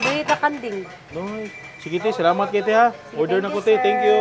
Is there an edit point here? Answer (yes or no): no